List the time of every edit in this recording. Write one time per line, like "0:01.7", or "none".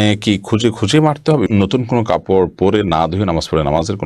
0:01.5